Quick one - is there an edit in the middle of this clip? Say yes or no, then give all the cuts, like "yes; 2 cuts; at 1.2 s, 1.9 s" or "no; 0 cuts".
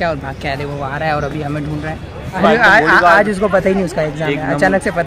no; 0 cuts